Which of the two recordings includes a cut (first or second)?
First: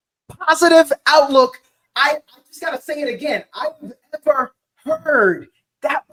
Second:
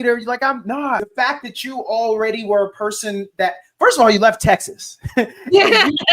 second